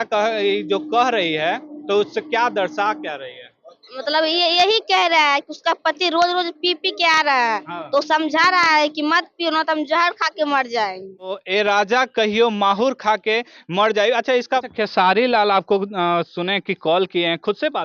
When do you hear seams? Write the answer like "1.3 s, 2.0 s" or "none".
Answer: 11.3 s, 14.7 s

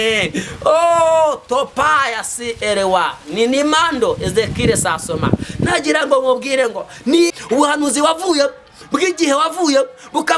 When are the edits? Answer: 7.4 s

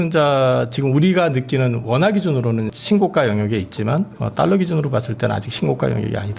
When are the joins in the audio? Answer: 2.7 s

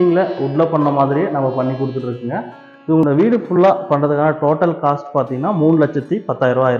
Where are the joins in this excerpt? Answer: 3.0 s

